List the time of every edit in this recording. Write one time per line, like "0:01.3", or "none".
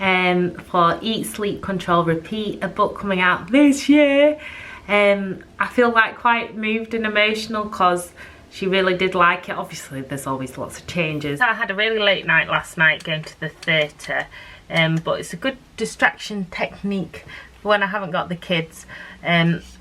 0:11.3